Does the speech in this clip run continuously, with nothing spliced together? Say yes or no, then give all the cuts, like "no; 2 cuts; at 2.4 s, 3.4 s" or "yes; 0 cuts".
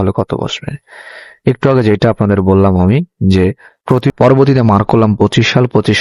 no; 1 cut; at 4.1 s